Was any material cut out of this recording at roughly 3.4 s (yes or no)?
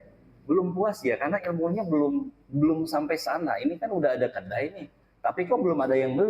no